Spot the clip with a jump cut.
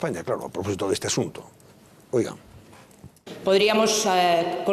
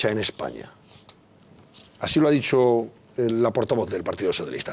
second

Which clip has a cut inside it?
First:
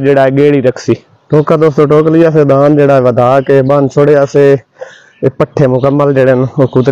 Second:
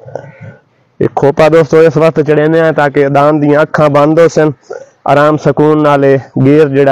first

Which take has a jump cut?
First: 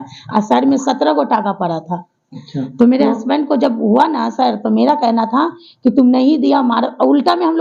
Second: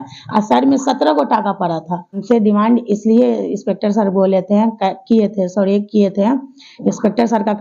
second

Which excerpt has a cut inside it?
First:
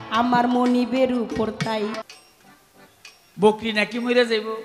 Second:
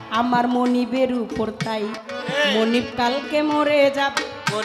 first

